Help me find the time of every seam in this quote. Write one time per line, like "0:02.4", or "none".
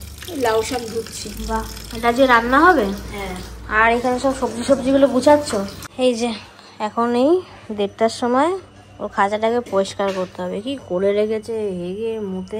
0:05.8